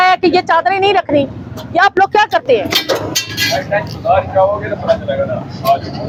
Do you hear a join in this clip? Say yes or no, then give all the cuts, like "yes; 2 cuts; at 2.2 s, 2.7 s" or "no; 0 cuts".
no; 0 cuts